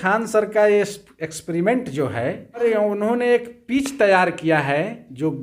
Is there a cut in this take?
yes; 1 cut; at 2.6 s

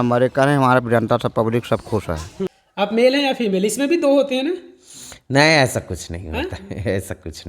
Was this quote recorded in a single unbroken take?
no; 1 cut; at 2.5 s

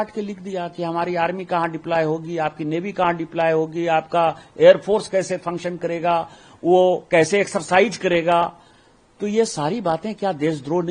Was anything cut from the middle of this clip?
no; 0 cuts

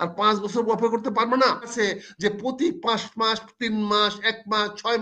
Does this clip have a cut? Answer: yes; 1 cut; at 1.7 s

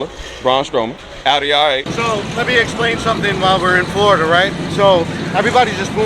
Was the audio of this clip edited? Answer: yes; 2 cuts; at 1.1 s, 1.9 s

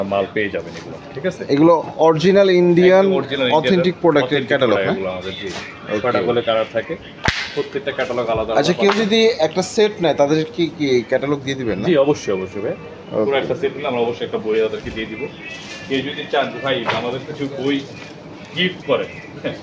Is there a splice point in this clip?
no; 0 cuts

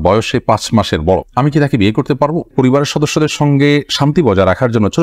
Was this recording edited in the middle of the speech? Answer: yes; 1 cut; at 2.5 s

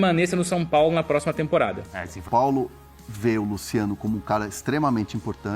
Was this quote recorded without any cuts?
no; 1 cut; at 2.3 s

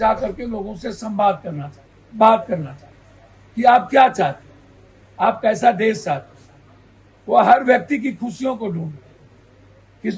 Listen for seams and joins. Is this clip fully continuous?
yes; 0 cuts

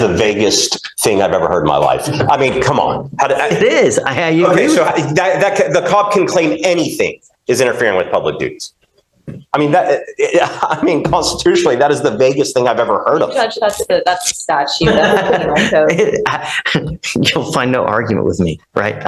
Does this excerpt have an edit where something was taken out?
no; 0 cuts

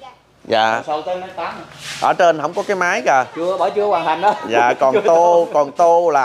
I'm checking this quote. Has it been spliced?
no; 0 cuts

